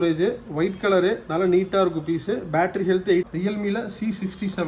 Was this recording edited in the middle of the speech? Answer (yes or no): yes